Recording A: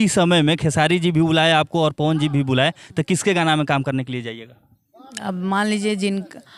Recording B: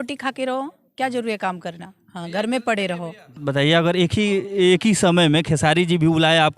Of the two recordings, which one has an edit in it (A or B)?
B